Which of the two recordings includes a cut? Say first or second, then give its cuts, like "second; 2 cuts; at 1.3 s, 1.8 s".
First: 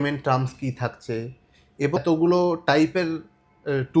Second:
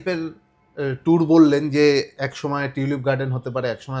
first; 1 cut; at 2.0 s